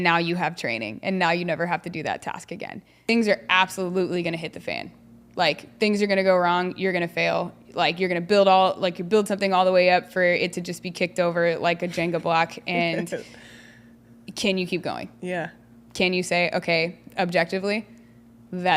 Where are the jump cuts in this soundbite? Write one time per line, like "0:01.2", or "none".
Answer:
0:03.1